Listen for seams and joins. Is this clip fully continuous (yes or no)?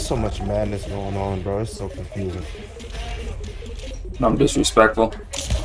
yes